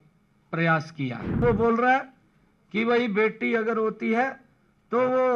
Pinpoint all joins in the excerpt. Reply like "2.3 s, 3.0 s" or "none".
1.4 s

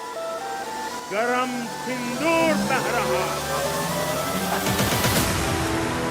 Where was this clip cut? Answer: 1.0 s

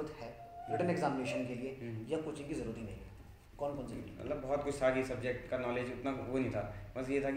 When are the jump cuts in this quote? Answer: 3.4 s

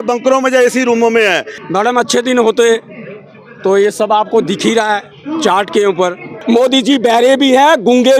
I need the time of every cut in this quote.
1.5 s, 6.3 s

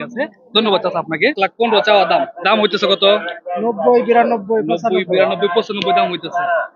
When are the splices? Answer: 1.4 s

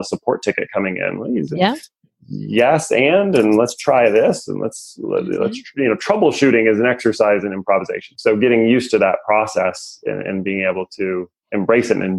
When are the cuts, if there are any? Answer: none

